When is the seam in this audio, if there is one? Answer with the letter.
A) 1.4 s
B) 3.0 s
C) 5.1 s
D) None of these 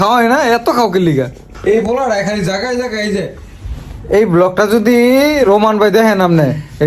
A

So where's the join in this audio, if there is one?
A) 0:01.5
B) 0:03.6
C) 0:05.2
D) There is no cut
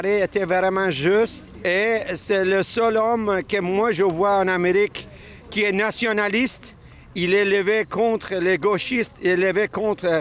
A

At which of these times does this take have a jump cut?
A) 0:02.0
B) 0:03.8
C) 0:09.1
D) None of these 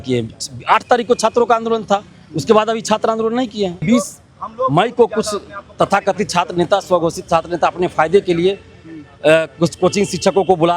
B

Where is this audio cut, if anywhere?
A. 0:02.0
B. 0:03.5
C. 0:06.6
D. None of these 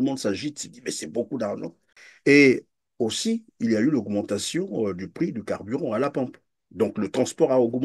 A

